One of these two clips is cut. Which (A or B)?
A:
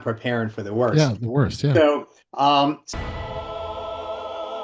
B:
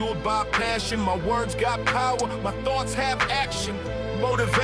A